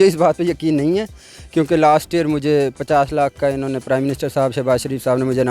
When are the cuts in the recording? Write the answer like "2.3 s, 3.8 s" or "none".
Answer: none